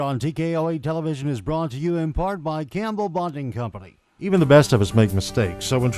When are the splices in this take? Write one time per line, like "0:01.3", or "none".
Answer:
0:04.3

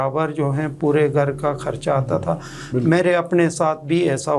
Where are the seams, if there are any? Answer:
none

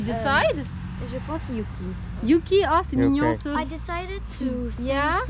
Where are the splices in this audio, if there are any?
none

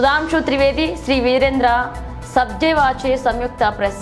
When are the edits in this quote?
none

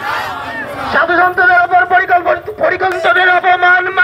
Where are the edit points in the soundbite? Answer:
0:02.2

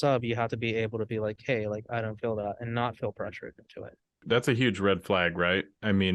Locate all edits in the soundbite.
0:04.2

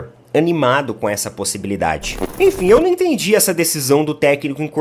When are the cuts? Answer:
0:02.2

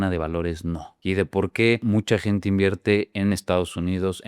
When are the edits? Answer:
none

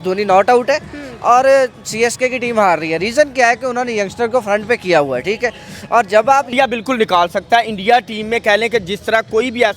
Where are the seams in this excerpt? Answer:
0:06.5

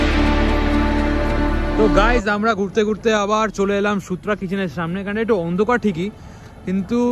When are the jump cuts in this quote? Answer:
none

